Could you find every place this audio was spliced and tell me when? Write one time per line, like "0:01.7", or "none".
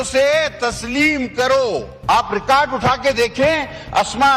0:01.5